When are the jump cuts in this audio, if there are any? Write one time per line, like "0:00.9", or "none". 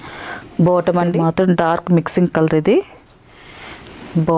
0:01.1